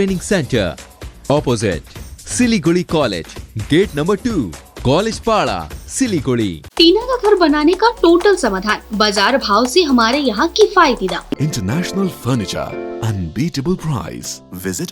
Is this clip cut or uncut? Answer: cut